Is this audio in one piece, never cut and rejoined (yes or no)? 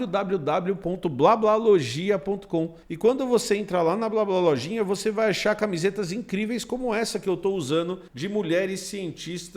no